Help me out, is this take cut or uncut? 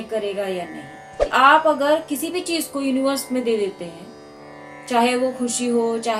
cut